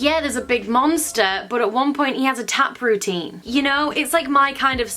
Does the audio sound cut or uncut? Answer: uncut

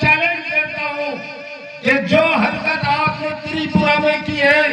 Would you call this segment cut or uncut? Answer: uncut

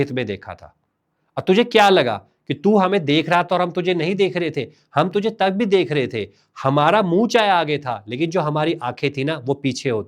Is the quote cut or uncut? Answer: uncut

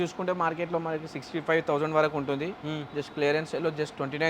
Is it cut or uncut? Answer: uncut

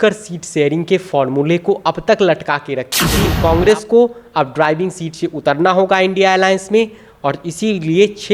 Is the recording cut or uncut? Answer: cut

